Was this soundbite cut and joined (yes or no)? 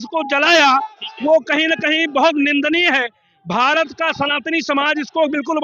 no